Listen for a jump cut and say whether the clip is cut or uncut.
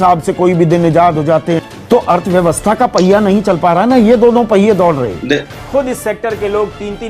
cut